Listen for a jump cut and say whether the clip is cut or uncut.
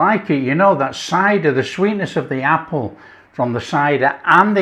uncut